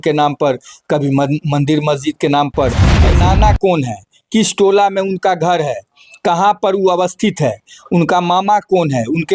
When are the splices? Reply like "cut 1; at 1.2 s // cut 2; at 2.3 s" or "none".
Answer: cut 1; at 3.1 s